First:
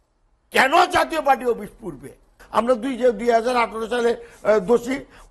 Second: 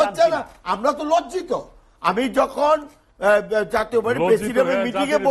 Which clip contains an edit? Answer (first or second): first